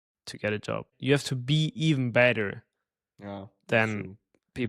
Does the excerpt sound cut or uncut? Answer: cut